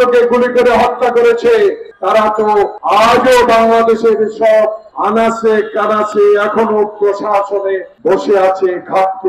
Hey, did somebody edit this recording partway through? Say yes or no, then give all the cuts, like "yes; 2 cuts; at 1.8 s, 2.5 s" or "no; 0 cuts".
no; 0 cuts